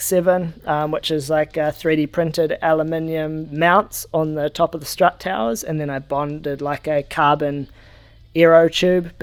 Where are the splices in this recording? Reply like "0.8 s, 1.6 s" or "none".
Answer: none